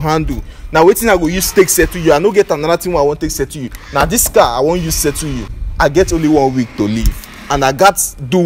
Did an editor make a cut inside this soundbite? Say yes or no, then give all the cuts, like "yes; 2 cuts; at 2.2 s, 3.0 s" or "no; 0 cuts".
yes; 1 cut; at 5.6 s